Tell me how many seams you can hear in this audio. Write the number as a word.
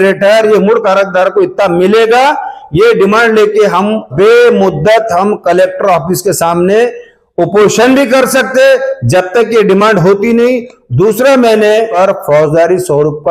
two